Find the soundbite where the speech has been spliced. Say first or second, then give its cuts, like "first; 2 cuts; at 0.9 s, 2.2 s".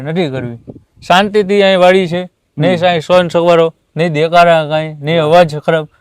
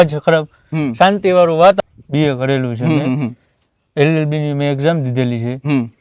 second; 1 cut; at 1.8 s